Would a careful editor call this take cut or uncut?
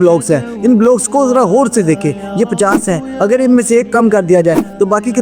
uncut